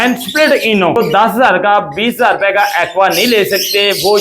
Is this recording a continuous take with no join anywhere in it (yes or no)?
no